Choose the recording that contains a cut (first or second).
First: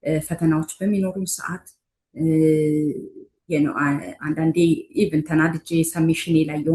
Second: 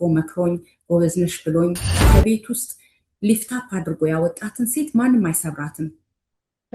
second